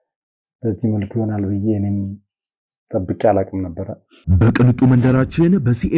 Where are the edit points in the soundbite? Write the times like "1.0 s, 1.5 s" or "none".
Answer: 4.1 s